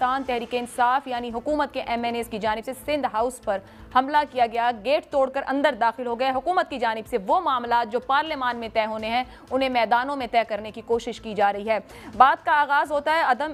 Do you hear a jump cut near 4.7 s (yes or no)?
no